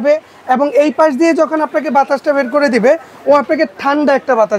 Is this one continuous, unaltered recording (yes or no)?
yes